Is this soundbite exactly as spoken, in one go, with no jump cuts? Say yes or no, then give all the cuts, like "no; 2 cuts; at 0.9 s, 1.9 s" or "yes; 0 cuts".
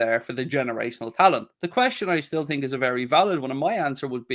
no; 1 cut; at 1.5 s